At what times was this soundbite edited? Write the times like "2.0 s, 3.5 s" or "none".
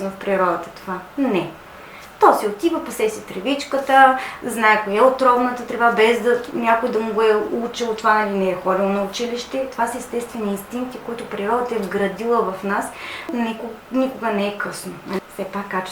13.3 s, 15.2 s